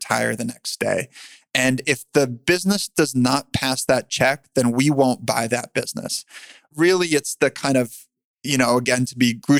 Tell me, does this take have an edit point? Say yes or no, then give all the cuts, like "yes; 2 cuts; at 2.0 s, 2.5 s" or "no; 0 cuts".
yes; 1 cut; at 6.7 s